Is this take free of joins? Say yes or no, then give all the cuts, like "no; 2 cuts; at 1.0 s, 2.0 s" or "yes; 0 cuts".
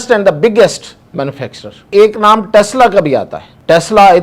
no; 1 cut; at 1.9 s